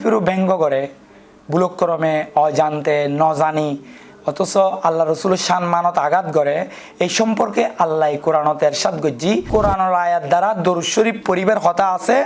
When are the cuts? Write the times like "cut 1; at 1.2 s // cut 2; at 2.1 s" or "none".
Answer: cut 1; at 9.5 s